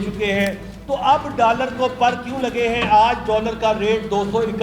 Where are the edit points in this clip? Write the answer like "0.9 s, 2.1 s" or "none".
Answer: none